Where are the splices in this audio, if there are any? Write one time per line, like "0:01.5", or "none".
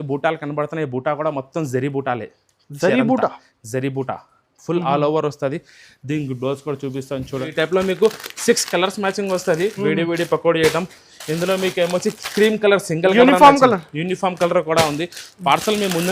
0:07.5